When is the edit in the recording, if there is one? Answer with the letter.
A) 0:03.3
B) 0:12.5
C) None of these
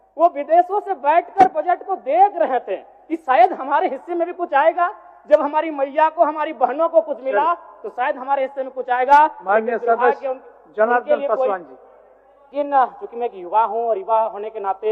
B